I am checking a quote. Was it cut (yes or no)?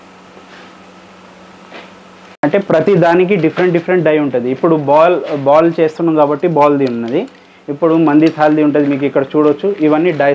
no